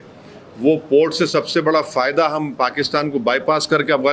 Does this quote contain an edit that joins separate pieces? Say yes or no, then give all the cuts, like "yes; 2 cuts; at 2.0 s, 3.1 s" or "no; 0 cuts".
no; 0 cuts